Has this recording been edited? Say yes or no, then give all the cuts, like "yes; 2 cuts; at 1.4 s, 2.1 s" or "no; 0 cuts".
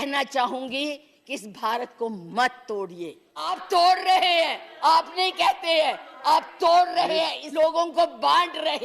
yes; 2 cuts; at 3.6 s, 7.4 s